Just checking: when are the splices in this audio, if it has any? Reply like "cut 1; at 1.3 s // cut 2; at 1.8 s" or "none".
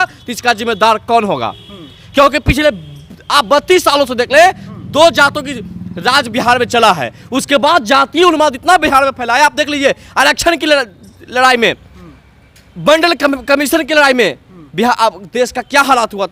none